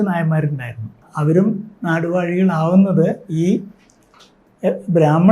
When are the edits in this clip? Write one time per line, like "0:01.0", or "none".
0:01.1